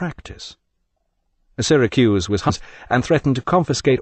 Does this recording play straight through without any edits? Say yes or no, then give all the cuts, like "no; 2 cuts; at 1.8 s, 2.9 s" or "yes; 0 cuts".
yes; 0 cuts